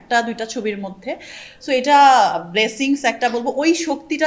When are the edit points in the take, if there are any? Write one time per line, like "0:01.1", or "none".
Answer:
none